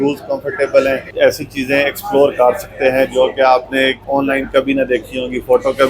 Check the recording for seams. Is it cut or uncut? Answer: cut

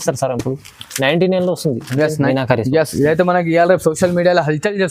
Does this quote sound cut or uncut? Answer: cut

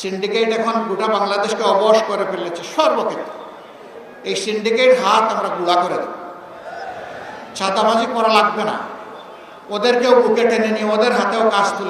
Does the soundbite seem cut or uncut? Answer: uncut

